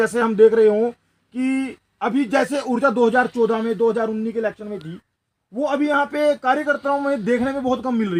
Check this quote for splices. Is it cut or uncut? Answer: uncut